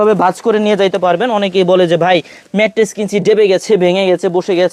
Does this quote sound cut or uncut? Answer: uncut